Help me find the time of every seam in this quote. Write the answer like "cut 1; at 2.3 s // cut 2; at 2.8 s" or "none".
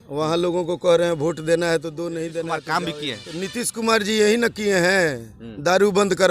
cut 1; at 2.6 s